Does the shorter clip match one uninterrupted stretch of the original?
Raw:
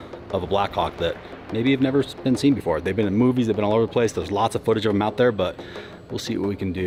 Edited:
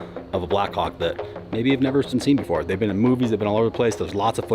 no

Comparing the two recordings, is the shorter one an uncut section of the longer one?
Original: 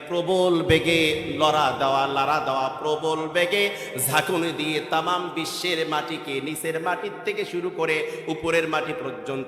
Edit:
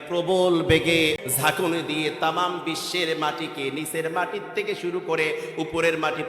no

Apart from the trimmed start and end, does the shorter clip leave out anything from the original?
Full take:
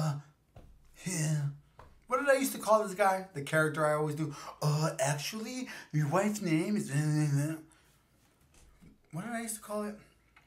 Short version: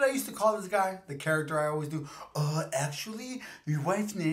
no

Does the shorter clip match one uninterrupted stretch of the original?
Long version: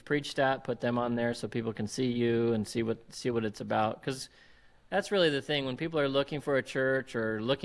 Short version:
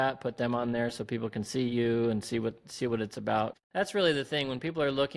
no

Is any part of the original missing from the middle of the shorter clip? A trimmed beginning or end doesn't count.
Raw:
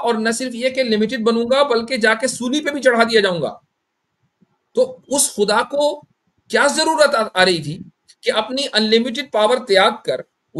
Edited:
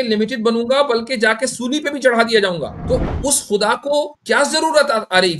yes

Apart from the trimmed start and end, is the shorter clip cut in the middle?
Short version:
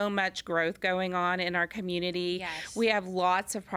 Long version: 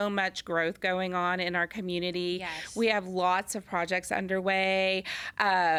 no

